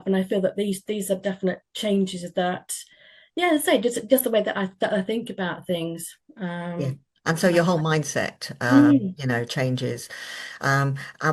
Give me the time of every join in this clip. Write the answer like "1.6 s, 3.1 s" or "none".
none